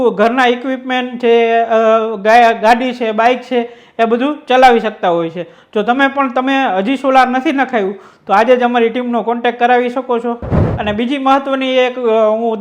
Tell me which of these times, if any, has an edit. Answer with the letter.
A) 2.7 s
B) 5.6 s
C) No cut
C